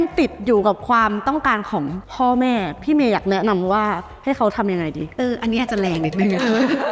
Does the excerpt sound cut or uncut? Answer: uncut